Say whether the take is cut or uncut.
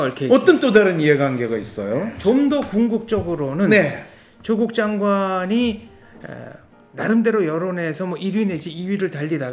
cut